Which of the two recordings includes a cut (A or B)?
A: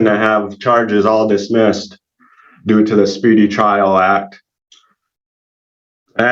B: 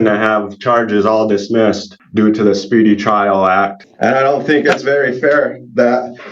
B